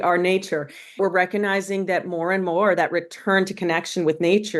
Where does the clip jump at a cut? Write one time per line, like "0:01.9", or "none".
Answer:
0:01.0